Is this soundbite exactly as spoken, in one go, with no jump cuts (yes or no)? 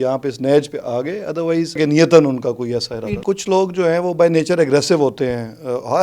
no